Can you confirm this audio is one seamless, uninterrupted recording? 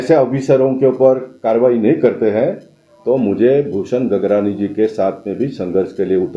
yes; 0 cuts

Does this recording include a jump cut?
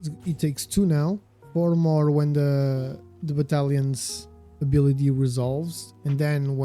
yes; 1 cut; at 1.3 s

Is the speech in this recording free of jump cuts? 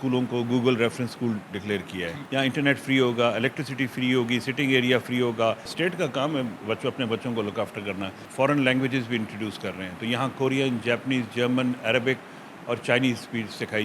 no; 3 cuts; at 2.2 s, 5.7 s, 8.2 s

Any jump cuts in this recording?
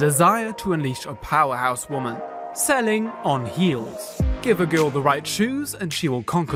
no; 0 cuts

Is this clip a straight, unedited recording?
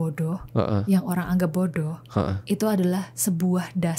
yes; 0 cuts

